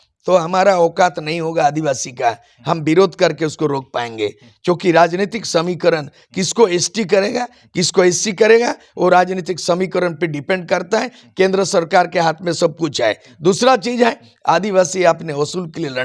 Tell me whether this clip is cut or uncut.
uncut